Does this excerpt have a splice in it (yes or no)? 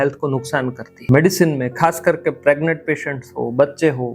yes